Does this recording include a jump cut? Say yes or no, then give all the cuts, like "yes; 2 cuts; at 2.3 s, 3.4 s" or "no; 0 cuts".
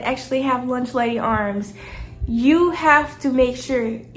no; 0 cuts